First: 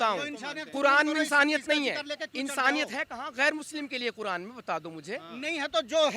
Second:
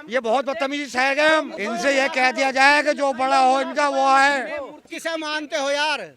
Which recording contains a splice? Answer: second; 2 cuts; at 1.5 s, 4.9 s

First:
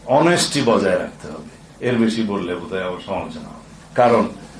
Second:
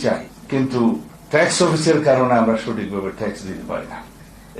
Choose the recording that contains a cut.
second; 1 cut; at 1.1 s

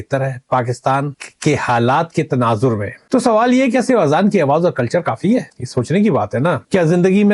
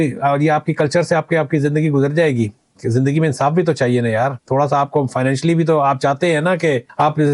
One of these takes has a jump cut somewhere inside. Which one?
first; 1 cut; at 2.9 s

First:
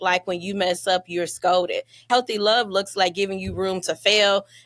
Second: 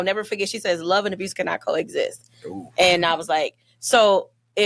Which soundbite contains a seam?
first; 1 cut; at 2.0 s

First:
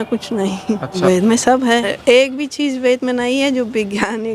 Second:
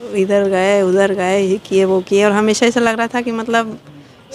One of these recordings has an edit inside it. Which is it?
first; 2 cuts; at 0.9 s, 1.9 s

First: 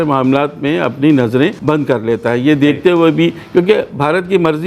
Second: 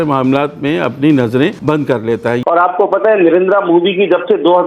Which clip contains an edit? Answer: second; 1 cut; at 2.4 s

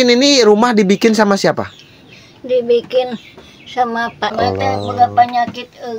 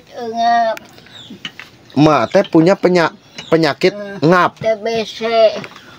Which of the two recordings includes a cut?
first; 1 cut; at 4.3 s

